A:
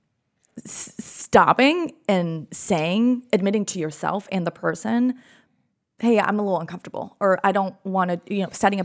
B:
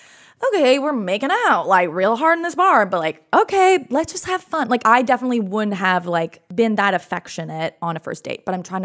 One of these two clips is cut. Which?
B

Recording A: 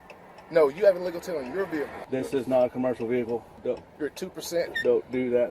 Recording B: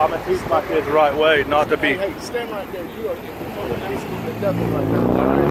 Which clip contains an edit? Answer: A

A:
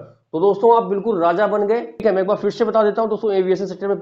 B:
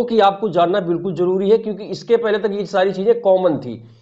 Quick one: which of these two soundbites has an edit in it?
A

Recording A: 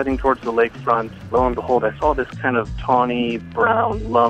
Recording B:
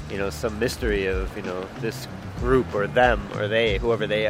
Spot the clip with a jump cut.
A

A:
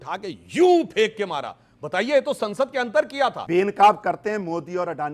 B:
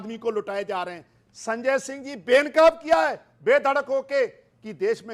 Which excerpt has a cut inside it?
A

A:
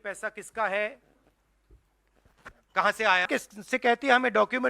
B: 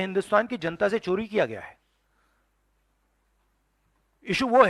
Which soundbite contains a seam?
A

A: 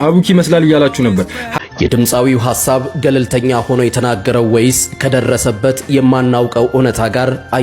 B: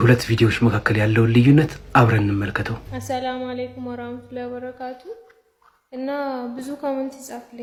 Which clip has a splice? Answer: A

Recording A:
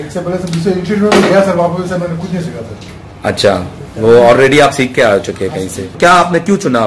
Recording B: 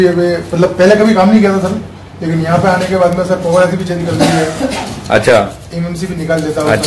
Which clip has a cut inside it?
A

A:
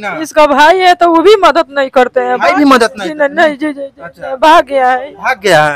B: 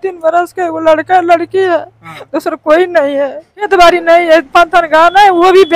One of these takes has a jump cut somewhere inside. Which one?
B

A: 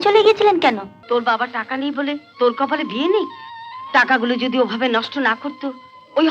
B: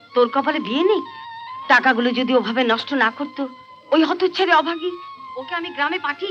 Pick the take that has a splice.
A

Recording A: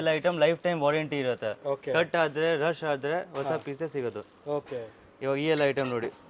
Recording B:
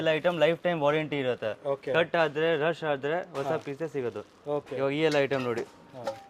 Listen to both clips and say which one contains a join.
B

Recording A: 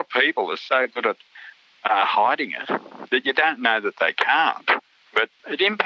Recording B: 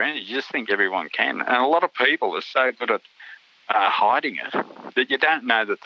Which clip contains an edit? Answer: A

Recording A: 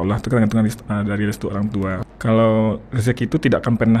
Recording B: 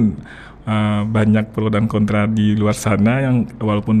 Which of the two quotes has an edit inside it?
A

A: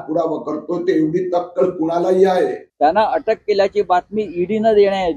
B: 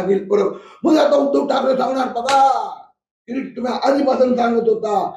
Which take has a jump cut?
A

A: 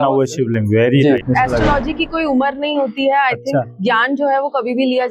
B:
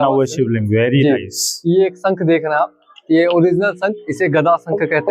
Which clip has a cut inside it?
A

